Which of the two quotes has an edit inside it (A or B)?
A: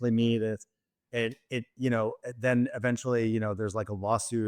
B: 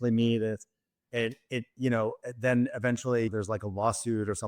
B